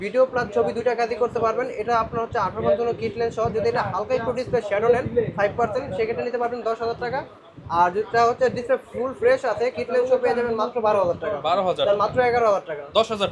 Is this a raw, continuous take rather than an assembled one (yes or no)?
yes